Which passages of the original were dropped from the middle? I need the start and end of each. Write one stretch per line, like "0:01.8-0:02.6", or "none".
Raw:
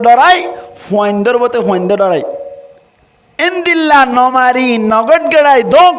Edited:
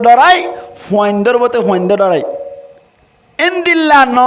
none